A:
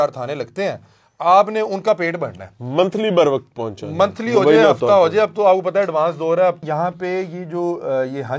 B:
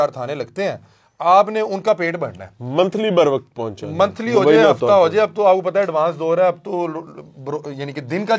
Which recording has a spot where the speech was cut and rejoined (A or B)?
A